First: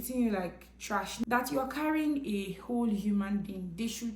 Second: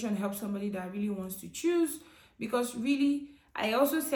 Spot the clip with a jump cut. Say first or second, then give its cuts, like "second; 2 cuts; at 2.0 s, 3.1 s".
first; 1 cut; at 1.1 s